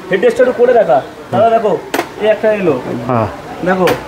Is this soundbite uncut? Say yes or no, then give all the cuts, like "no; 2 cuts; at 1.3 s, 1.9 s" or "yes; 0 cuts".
yes; 0 cuts